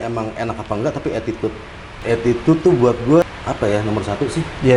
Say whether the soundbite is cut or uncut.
cut